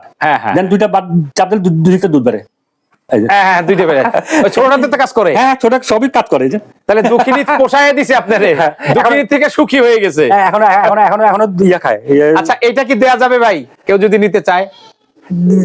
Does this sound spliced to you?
no; 0 cuts

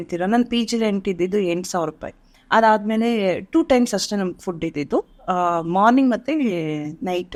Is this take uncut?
yes; 0 cuts

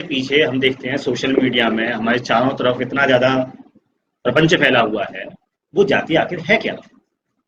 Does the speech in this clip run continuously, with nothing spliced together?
yes; 0 cuts

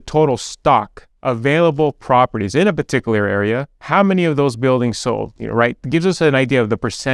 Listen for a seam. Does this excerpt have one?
no; 0 cuts

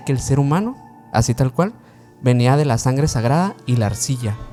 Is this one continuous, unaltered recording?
yes; 0 cuts

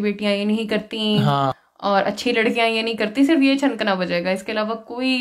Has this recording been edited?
no; 0 cuts

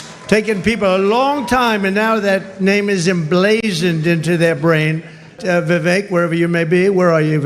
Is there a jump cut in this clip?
yes; 1 cut; at 5.4 s

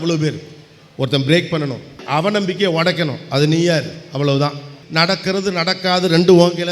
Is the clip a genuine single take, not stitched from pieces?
no; 2 cuts; at 2.0 s, 4.8 s

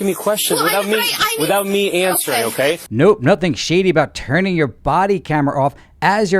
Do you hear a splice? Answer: yes; 1 cut; at 2.9 s

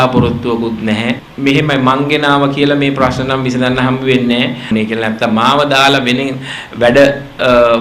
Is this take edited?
yes; 2 cuts; at 1.3 s, 4.7 s

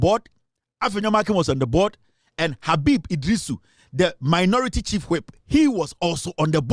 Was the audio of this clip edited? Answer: no; 0 cuts

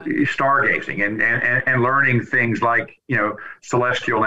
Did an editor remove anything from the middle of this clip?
no; 0 cuts

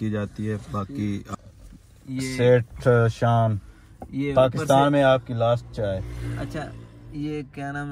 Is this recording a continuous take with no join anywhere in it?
no; 1 cut; at 1.3 s

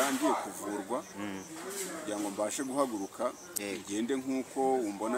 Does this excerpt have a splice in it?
no; 0 cuts

